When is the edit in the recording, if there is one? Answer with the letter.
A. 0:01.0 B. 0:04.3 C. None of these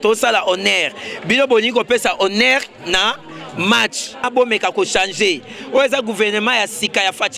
B